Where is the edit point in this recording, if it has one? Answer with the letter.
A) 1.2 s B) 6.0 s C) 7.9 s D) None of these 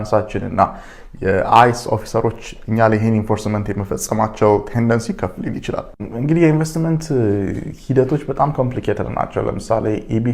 B